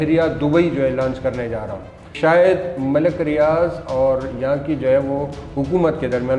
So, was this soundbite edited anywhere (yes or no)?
yes